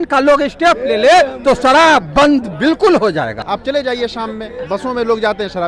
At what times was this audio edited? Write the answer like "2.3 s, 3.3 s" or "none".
3.4 s